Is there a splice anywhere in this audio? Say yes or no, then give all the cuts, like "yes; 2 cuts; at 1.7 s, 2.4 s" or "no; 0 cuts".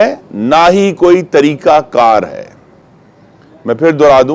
no; 0 cuts